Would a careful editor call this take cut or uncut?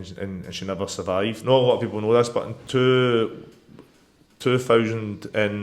cut